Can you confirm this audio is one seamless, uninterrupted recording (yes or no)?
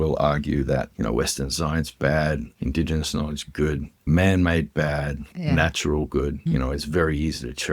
no